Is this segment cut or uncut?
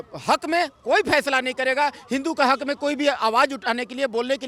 uncut